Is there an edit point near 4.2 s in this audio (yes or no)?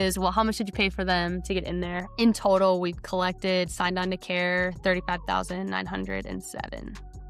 no